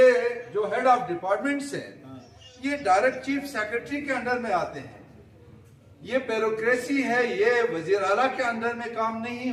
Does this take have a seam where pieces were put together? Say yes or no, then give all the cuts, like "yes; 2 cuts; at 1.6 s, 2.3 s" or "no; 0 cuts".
no; 0 cuts